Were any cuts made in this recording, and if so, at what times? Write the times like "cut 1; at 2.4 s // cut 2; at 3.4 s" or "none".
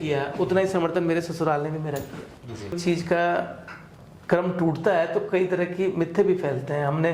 cut 1; at 2.8 s